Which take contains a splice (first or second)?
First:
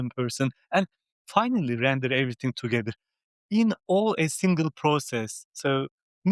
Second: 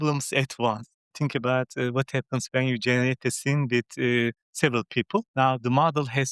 second